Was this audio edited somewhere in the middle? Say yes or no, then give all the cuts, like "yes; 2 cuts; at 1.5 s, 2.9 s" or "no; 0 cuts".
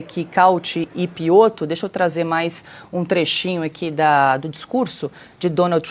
no; 0 cuts